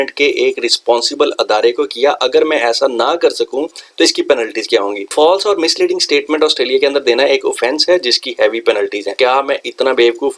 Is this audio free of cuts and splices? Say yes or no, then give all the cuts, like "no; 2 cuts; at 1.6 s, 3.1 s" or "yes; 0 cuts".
no; 2 cuts; at 5.1 s, 9.1 s